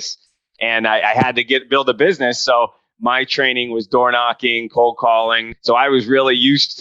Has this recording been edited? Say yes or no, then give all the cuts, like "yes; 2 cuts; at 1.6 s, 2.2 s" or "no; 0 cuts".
yes; 1 cut; at 5.5 s